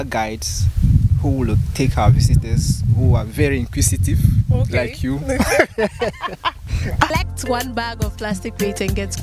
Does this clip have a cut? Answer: yes; 1 cut; at 7.1 s

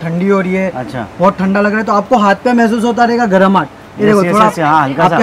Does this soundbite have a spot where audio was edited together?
no; 0 cuts

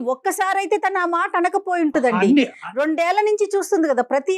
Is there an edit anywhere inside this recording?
no; 0 cuts

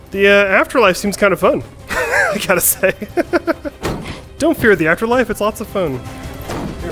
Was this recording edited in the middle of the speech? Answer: yes; 1 cut; at 3.7 s

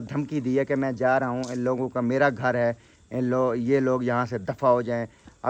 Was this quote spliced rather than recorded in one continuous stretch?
no; 0 cuts

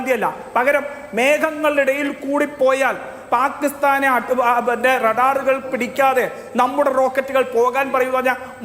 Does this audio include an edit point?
no; 0 cuts

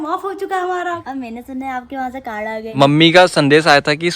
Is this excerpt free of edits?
no; 2 cuts; at 1.0 s, 2.7 s

